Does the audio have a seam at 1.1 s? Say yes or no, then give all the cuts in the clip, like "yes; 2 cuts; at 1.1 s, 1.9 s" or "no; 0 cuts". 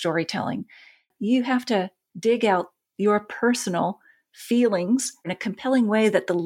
yes; 3 cuts; at 1.1 s, 2.0 s, 5.3 s